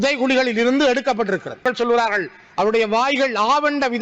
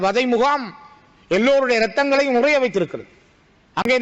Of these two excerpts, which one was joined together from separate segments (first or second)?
first